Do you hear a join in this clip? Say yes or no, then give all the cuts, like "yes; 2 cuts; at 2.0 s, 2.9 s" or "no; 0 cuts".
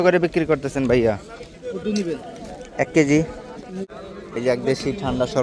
yes; 1 cut; at 3.8 s